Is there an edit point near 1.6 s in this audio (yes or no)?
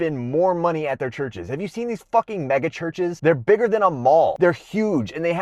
no